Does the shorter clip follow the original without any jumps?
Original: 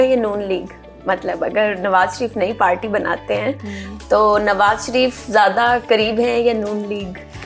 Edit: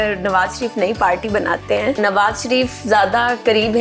no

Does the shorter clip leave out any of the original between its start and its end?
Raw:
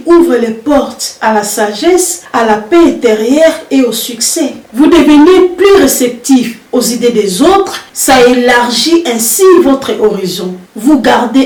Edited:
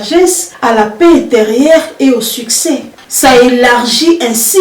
yes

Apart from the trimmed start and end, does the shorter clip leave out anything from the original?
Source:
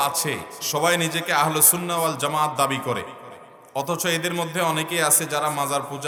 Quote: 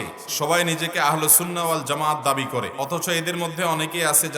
yes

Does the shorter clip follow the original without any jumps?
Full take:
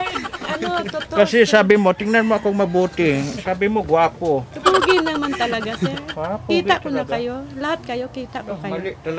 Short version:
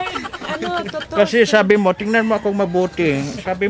yes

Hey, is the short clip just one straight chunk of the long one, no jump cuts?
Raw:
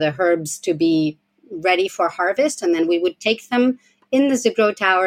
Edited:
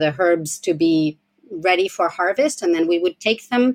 yes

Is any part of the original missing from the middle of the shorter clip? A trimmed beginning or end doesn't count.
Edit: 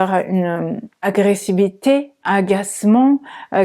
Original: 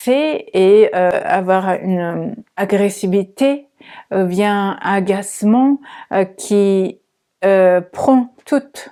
yes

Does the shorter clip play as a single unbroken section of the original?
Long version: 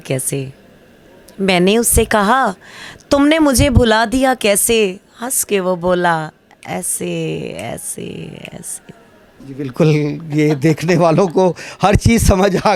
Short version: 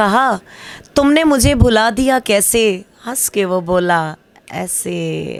yes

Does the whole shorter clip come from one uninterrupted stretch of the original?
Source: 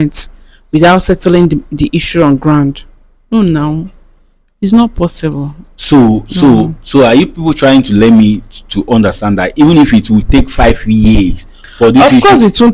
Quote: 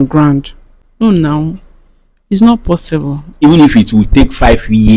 no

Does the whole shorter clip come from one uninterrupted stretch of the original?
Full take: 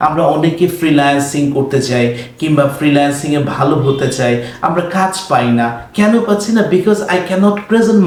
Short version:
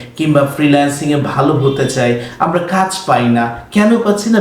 yes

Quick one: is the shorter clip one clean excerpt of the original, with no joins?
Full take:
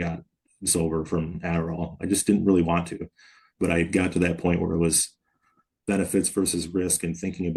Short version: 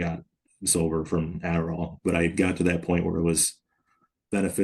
no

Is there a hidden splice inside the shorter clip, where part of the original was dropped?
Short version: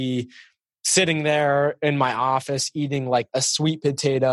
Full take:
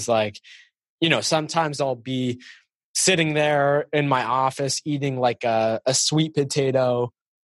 yes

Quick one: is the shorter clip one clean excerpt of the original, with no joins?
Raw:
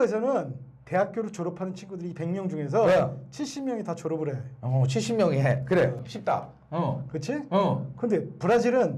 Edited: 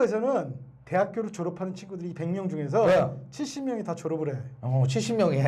yes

